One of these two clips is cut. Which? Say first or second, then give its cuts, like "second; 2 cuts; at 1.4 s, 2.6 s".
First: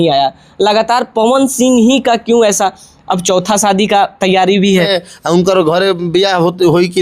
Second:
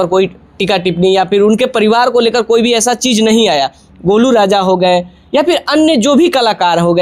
first; 1 cut; at 4.9 s